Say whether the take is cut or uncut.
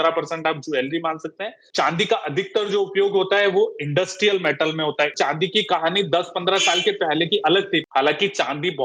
cut